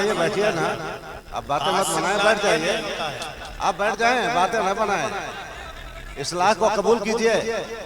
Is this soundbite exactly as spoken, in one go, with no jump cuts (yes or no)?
yes